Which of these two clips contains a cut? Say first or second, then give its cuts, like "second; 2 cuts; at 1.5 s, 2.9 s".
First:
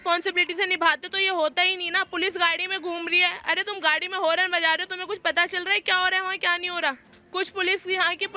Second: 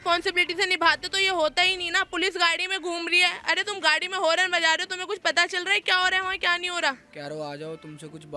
second; 1 cut; at 7.1 s